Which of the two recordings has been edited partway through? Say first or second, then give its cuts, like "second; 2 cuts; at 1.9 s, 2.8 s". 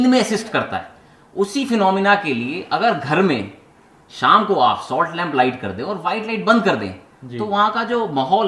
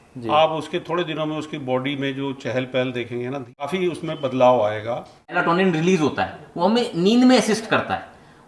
second; 2 cuts; at 3.7 s, 5.4 s